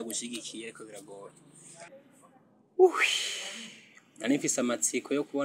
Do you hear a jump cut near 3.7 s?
no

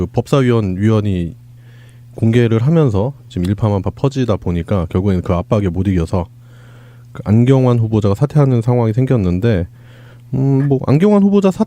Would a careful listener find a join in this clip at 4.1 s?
yes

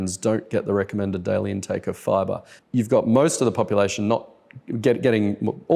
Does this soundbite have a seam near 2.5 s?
yes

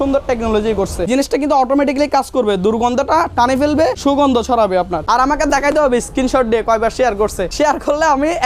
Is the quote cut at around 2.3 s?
no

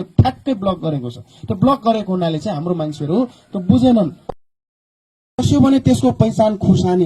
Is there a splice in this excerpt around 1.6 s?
no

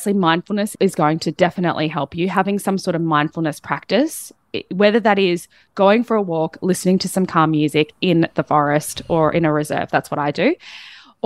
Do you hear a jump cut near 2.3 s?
no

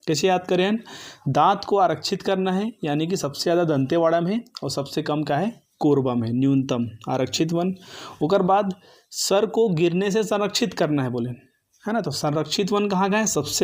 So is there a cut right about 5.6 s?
no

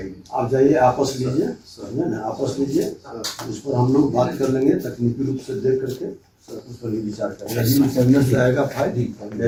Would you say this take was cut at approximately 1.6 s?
no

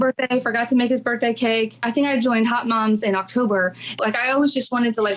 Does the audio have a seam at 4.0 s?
yes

